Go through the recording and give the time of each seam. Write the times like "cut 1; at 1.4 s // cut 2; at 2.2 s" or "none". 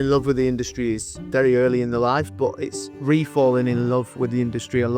cut 1; at 1.1 s